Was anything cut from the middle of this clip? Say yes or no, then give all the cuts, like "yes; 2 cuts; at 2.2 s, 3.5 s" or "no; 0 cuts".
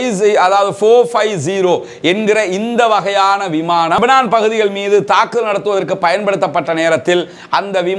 yes; 1 cut; at 4.0 s